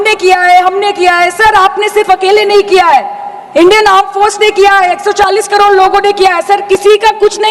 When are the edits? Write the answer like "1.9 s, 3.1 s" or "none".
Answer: none